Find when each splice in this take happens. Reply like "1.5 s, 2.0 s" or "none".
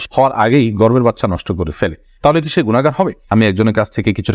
3.3 s